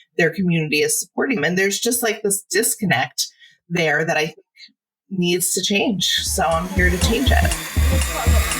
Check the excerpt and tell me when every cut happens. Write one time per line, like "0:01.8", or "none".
0:07.6